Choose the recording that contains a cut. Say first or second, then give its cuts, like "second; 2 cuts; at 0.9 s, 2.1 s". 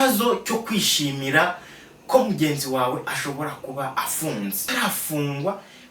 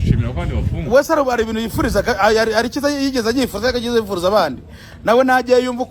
first; 1 cut; at 4.7 s